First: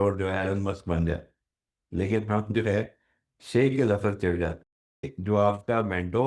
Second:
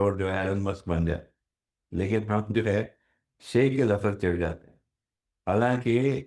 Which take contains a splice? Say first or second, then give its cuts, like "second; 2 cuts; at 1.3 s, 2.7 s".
first; 1 cut; at 5.1 s